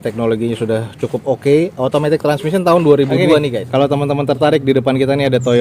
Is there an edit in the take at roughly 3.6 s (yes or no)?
yes